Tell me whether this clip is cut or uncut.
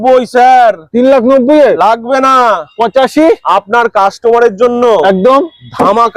uncut